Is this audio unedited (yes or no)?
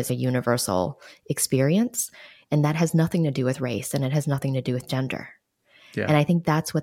yes